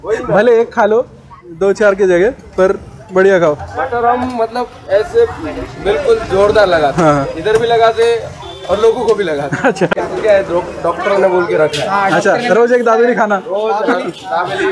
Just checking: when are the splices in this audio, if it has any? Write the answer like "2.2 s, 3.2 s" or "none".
9.9 s